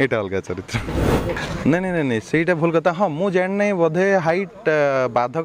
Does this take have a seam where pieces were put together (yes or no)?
yes